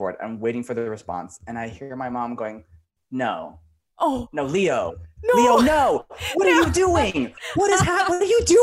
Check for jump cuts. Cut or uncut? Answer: uncut